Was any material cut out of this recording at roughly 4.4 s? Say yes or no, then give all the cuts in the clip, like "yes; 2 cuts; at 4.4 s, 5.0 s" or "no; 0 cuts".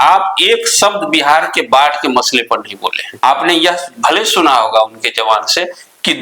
no; 1 cut; at 3.0 s